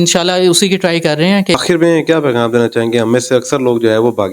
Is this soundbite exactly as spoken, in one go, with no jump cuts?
no; 1 cut; at 1.5 s

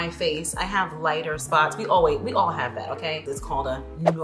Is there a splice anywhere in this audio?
yes; 1 cut; at 3.2 s

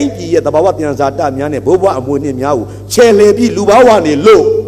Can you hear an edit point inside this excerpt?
no; 0 cuts

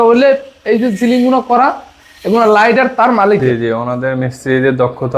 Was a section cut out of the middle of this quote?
yes; 1 cut; at 3.4 s

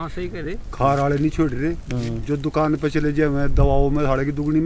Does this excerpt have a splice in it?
no; 0 cuts

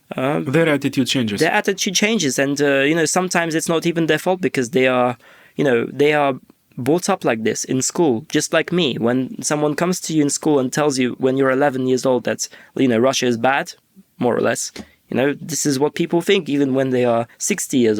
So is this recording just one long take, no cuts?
yes; 0 cuts

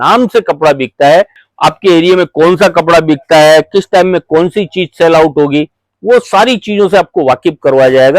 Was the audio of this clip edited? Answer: yes; 1 cut; at 1.3 s

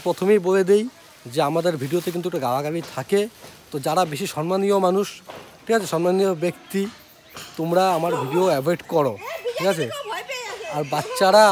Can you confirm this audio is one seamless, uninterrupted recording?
yes; 0 cuts

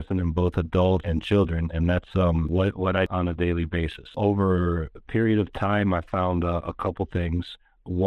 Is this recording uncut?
no; 3 cuts; at 1.1 s, 3.0 s, 4.1 s

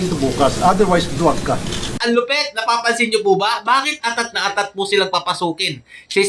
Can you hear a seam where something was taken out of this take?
yes; 1 cut; at 2.0 s

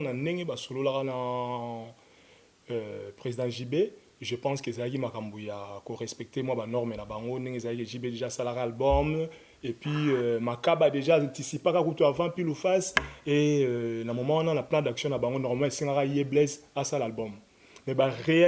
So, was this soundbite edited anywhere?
no; 0 cuts

